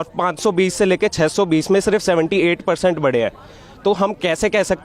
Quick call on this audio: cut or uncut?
uncut